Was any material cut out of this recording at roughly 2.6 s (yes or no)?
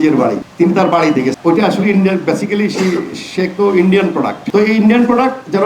no